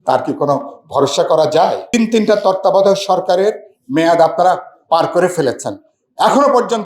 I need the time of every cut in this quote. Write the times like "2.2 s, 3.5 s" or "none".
1.9 s